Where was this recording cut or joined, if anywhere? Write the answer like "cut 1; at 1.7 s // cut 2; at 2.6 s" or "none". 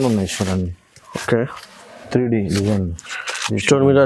none